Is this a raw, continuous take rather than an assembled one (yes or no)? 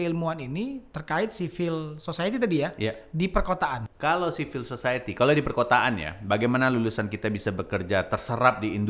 no